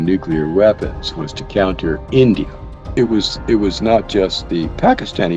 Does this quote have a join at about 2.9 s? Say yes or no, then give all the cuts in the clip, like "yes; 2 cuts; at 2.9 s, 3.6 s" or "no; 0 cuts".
yes; 1 cut; at 2.9 s